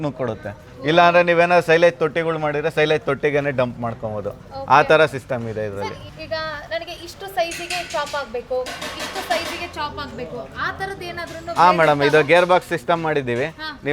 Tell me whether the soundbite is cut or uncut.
uncut